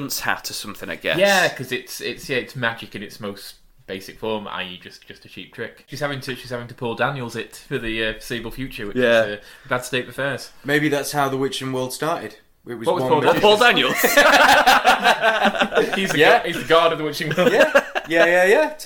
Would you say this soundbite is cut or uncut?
cut